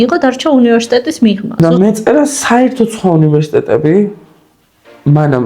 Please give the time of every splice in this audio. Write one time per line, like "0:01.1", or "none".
0:01.6